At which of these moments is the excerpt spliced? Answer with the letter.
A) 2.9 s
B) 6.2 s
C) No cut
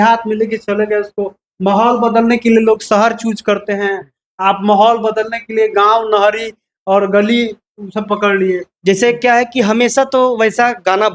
C